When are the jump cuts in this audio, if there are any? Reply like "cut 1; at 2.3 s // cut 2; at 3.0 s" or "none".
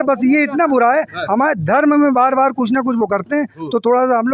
none